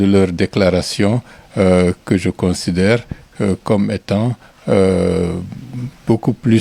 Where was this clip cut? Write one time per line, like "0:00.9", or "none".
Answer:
none